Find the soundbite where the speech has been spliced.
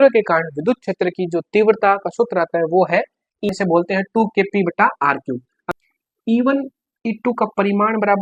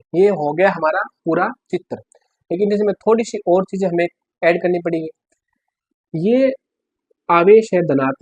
first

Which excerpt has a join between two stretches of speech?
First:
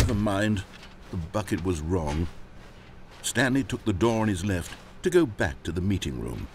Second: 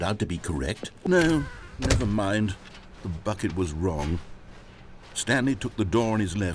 second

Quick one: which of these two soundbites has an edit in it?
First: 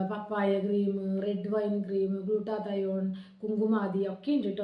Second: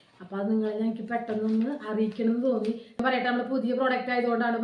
second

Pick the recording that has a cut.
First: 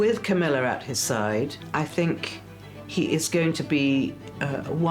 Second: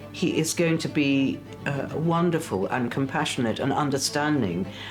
first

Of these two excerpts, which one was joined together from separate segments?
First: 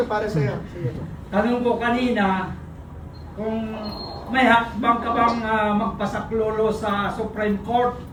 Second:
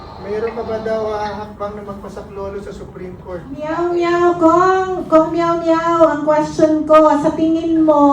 second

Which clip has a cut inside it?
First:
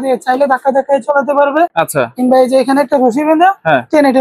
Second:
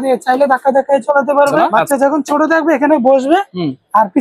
second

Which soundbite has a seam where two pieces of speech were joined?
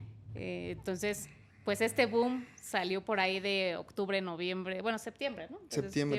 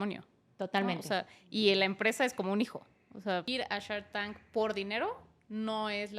second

